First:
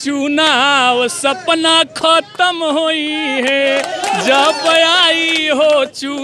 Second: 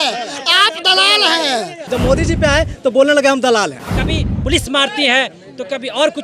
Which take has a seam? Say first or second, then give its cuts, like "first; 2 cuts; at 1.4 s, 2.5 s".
second; 2 cuts; at 1.9 s, 3.8 s